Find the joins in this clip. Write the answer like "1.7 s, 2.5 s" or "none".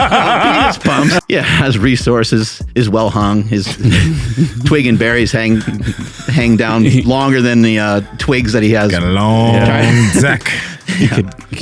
1.2 s